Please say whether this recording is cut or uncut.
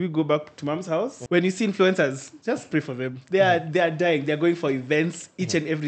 cut